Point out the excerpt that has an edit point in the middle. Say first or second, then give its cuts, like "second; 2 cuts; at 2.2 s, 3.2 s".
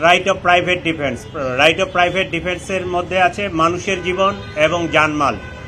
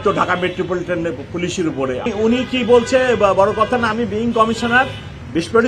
second; 1 cut; at 2.1 s